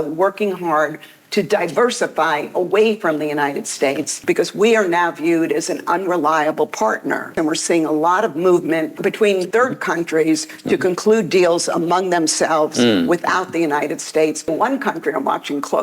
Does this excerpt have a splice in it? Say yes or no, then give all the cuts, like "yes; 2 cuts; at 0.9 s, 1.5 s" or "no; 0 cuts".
yes; 4 cuts; at 4.2 s, 7.3 s, 9.2 s, 14.5 s